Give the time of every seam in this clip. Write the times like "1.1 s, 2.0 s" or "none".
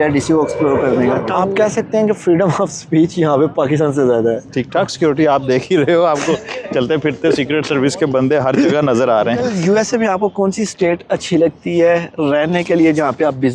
1.3 s, 4.5 s, 9.5 s